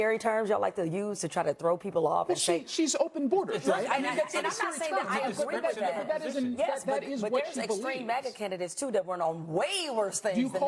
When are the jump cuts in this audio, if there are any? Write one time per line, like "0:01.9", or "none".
none